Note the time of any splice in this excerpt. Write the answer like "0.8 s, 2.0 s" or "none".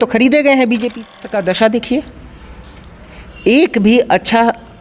1.1 s